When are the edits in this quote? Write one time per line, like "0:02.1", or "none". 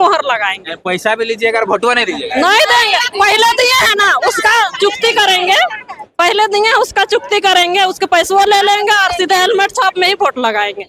none